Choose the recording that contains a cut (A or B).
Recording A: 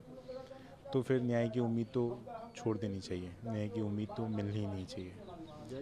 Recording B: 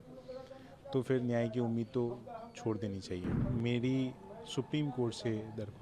B